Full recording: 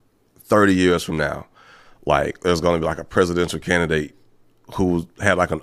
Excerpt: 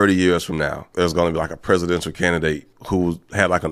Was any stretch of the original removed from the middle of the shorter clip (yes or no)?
yes